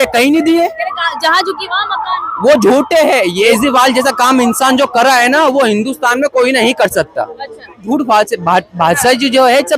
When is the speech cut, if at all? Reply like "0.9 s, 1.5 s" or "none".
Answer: 3.5 s, 7.8 s